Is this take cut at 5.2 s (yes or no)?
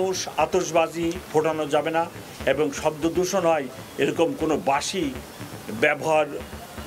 no